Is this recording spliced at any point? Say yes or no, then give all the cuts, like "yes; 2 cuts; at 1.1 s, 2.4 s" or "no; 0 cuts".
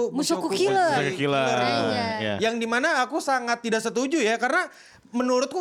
no; 0 cuts